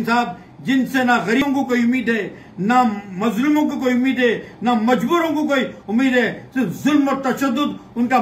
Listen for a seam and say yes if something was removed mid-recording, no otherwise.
yes